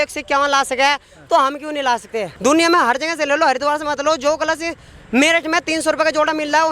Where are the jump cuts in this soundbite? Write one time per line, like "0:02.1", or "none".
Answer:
0:02.3